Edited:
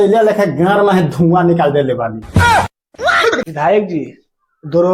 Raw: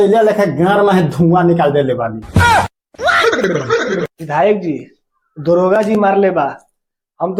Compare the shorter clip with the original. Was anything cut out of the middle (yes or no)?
yes